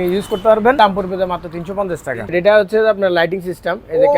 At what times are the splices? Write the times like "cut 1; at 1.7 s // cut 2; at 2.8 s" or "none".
cut 1; at 0.8 s // cut 2; at 2.4 s